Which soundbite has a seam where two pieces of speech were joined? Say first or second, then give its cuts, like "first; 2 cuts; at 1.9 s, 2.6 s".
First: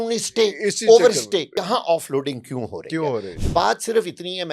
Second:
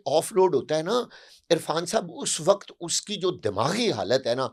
first; 2 cuts; at 1.5 s, 3.3 s